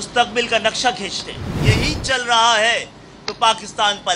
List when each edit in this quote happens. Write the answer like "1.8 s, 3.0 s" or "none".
1.6 s